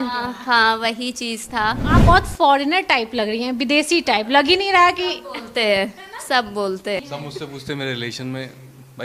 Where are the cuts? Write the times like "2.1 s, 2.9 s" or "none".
1.8 s, 7.0 s